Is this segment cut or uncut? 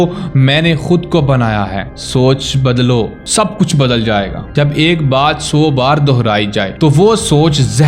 cut